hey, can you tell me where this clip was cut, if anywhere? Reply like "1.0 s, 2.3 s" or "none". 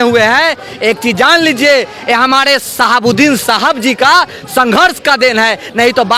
none